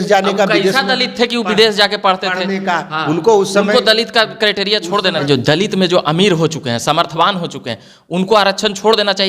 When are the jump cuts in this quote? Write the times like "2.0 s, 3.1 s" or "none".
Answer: 5.2 s